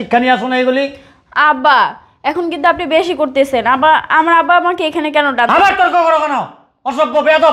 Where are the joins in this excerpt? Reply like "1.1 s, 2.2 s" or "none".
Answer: none